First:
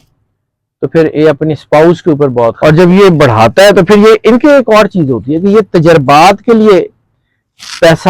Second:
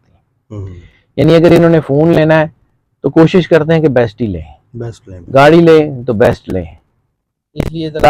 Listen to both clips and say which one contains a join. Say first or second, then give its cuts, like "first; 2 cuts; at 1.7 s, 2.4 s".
first; 1 cut; at 2.6 s